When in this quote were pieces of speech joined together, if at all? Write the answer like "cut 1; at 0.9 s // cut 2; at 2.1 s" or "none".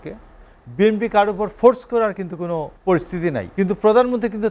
cut 1; at 2.7 s // cut 2; at 3.5 s